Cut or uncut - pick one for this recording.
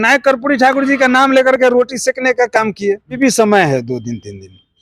cut